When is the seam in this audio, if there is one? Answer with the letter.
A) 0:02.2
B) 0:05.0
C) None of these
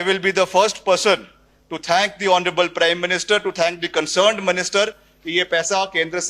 C